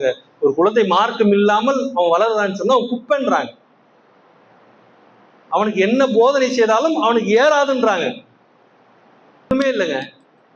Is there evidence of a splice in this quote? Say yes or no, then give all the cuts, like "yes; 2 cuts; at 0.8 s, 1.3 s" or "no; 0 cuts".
yes; 1 cut; at 9.5 s